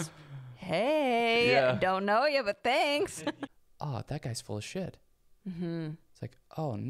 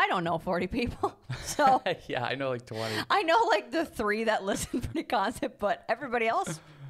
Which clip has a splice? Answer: first; 1 cut; at 3.1 s

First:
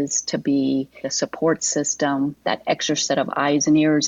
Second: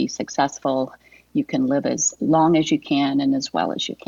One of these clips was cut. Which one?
first; 1 cut; at 2.4 s

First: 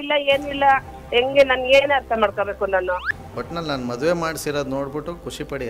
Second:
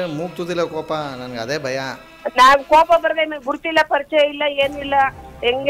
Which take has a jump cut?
first; 1 cut; at 3.1 s

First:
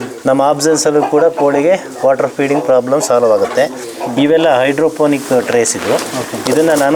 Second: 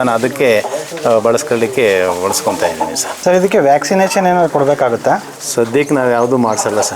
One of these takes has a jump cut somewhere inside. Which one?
second; 1 cut; at 3.1 s

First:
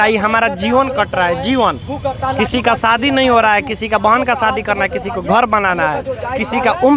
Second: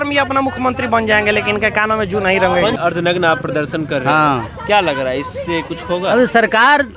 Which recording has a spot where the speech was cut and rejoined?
second; 1 cut; at 2.8 s

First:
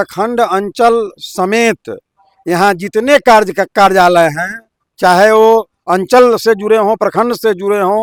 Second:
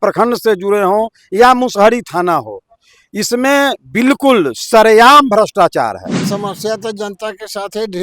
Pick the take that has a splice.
second; 1 cut; at 6.3 s

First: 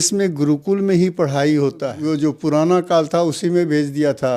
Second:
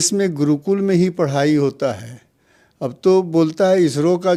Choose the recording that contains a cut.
first; 1 cut; at 1.9 s

